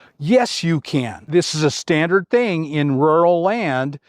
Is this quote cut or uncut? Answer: cut